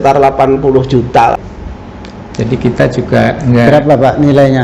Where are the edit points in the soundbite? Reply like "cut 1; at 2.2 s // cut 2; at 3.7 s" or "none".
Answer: cut 1; at 1.4 s

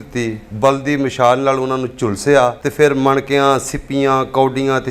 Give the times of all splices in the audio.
cut 1; at 2.6 s

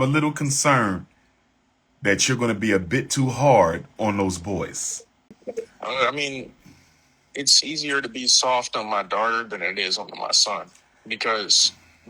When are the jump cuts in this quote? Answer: cut 1; at 5.3 s

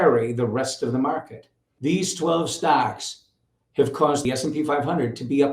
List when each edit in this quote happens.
cut 1; at 1.7 s // cut 2; at 4.2 s

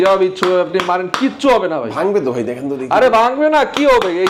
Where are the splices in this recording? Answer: none

